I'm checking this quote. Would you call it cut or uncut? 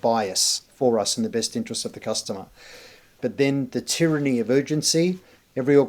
cut